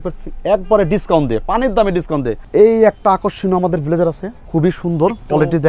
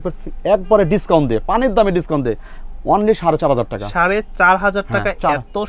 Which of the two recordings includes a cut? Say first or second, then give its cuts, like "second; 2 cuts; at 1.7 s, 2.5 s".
first; 2 cuts; at 2.4 s, 4.3 s